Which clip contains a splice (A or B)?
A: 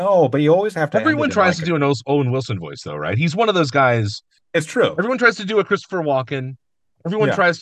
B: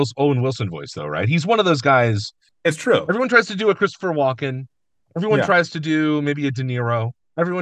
A